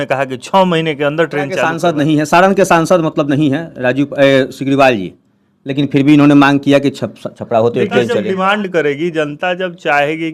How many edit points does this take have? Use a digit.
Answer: 2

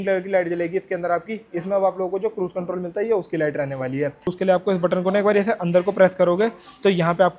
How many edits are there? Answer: 1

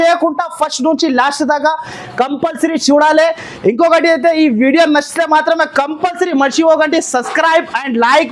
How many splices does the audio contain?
0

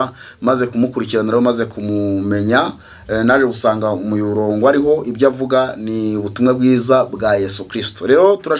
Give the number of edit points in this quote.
0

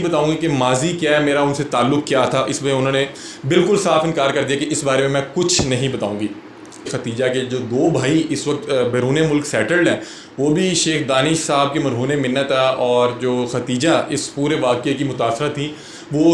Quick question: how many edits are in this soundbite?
1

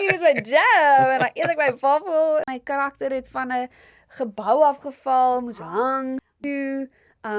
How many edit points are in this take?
2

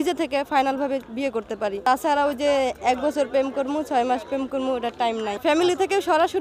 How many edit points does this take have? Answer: 2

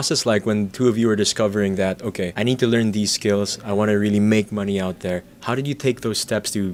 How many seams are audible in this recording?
0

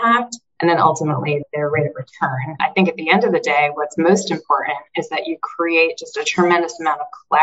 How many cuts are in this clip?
1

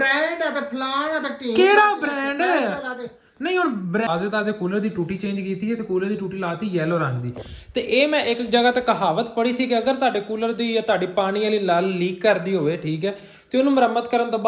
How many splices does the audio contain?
1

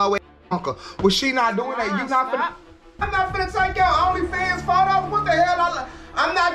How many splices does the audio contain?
1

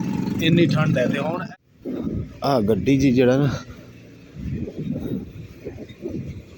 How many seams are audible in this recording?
1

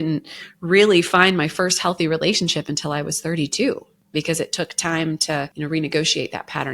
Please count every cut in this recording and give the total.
2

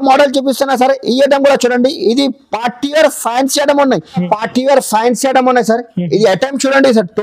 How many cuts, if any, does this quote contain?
1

